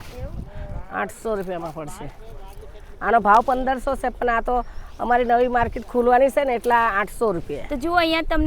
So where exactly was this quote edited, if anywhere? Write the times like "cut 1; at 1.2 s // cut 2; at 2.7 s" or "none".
cut 1; at 7.5 s